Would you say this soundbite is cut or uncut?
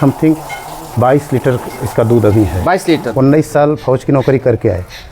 cut